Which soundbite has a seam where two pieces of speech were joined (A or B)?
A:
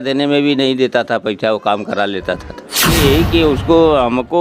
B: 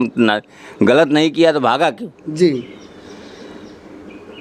A